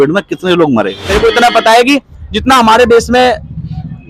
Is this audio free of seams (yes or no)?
no